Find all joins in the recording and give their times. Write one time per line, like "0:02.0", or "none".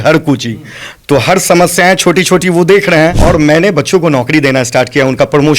0:03.2